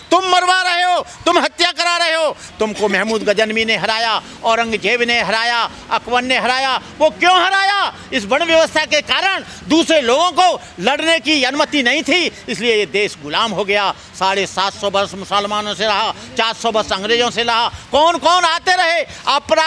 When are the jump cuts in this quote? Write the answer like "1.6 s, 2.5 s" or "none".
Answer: 2.5 s